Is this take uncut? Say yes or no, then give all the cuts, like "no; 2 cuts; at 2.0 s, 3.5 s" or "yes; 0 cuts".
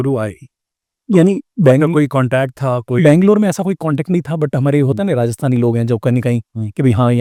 yes; 0 cuts